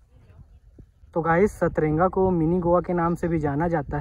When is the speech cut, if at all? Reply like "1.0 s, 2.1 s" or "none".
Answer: 1.1 s